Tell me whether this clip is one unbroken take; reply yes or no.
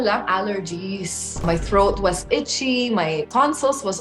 no